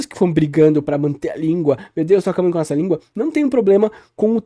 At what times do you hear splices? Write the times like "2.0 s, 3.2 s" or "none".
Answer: none